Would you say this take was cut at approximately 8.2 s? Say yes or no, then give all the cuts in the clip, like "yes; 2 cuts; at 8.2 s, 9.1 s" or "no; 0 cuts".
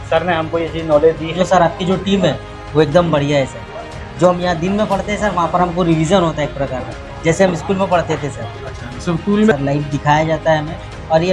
no; 2 cuts; at 1.4 s, 9.5 s